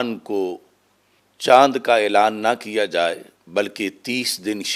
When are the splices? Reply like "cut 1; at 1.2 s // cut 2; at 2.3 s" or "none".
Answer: none